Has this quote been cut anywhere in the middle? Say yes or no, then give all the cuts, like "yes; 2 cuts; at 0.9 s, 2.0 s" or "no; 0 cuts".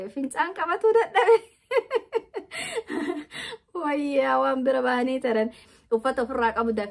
yes; 1 cut; at 5.7 s